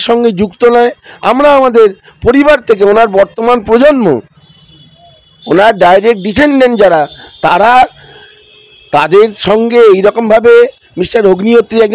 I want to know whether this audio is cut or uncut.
uncut